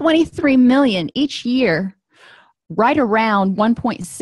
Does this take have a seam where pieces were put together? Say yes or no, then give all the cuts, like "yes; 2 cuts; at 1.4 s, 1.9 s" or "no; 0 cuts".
no; 0 cuts